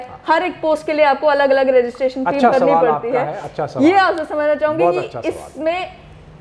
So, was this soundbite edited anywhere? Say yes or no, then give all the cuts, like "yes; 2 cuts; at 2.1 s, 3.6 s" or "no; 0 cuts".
no; 0 cuts